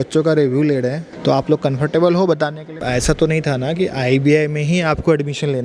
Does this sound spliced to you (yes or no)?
yes